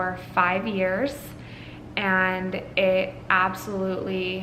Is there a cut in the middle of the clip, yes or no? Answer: no